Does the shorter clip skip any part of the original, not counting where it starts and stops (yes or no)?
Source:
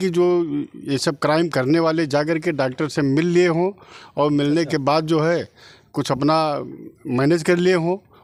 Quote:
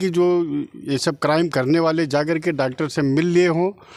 no